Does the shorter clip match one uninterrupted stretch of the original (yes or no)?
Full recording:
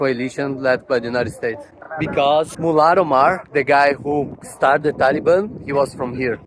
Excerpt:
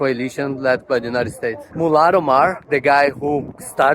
no